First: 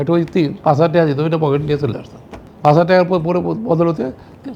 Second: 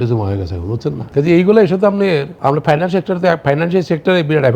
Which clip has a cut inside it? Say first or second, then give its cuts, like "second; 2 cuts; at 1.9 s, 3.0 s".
second; 2 cuts; at 1.0 s, 2.3 s